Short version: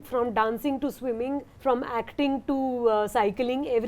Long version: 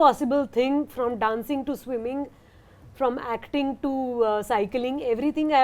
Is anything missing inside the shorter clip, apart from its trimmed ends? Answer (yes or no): yes